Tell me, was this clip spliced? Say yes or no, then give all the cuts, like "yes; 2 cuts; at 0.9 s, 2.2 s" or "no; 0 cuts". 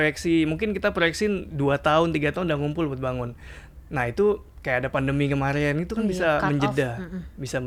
no; 0 cuts